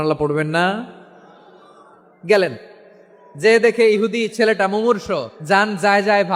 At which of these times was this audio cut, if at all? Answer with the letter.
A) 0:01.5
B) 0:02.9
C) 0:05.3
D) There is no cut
C